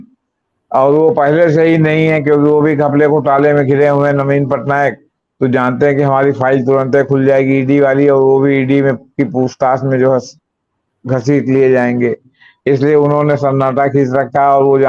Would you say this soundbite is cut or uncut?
uncut